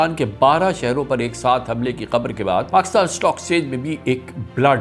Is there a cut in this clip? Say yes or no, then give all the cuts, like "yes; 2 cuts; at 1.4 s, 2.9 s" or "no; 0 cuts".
yes; 1 cut; at 2.7 s